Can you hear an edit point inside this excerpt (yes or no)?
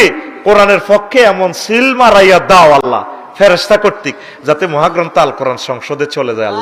no